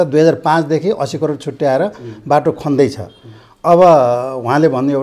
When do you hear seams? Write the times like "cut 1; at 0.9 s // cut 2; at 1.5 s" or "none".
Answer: none